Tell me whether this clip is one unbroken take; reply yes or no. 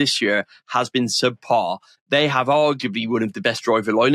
no